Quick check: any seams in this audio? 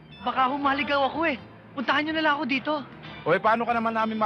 no; 0 cuts

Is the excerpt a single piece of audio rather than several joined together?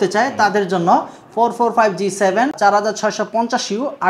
no; 1 cut; at 2.6 s

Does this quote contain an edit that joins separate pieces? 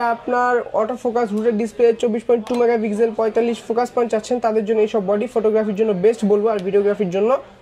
no; 0 cuts

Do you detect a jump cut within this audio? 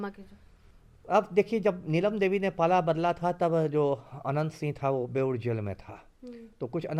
no; 0 cuts

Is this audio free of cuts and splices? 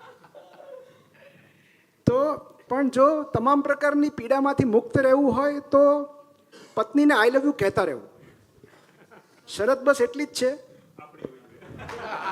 no; 1 cut; at 2.6 s

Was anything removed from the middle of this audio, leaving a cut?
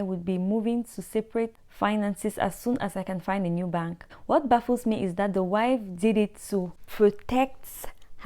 yes; 3 cuts; at 1.6 s, 4.1 s, 6.8 s

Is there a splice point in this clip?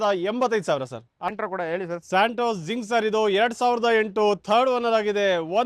no; 0 cuts

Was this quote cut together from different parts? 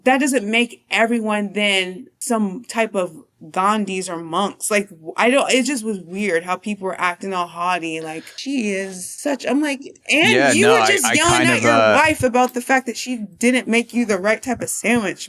no; 0 cuts

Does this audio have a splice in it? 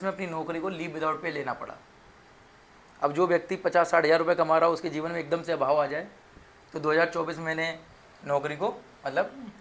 no; 0 cuts

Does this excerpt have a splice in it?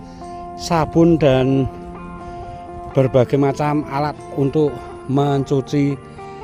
no; 0 cuts

